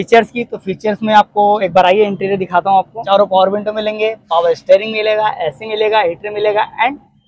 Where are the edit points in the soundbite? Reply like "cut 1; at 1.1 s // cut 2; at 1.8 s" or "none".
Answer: cut 1; at 3.0 s